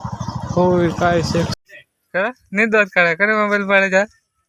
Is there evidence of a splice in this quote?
yes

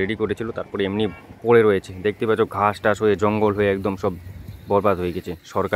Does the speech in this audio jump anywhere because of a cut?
no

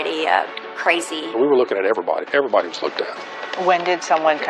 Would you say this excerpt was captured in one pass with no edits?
no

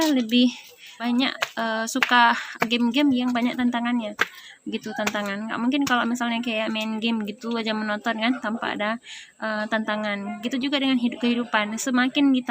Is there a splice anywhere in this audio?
yes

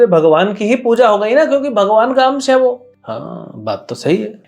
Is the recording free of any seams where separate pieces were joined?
no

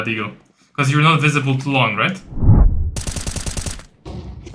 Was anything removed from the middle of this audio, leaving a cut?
yes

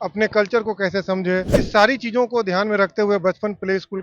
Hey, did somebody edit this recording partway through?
yes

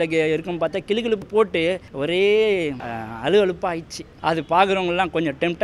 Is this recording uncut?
no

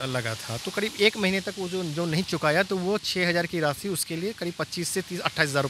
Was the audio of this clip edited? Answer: no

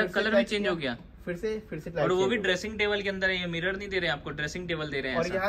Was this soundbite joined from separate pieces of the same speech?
no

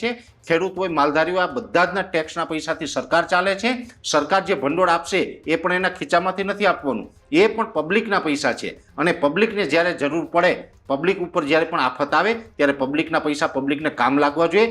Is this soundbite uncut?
yes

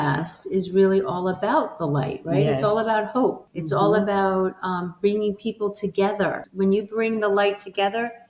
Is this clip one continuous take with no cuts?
no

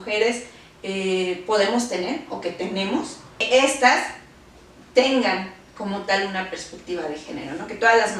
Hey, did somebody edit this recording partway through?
yes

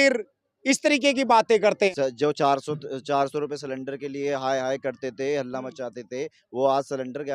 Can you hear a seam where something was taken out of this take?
yes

